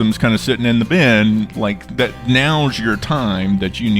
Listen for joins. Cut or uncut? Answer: uncut